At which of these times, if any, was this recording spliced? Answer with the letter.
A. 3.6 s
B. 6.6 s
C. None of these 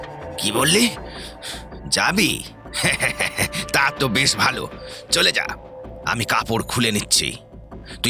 C